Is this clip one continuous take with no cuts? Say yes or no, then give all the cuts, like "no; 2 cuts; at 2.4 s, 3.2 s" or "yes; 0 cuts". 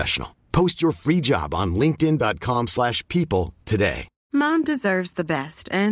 no; 1 cut; at 4.1 s